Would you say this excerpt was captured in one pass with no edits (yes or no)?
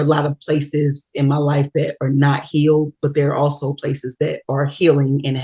yes